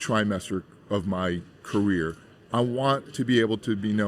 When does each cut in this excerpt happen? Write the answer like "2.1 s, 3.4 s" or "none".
2.2 s